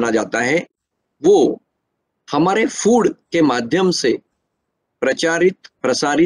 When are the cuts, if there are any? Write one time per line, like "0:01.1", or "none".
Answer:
none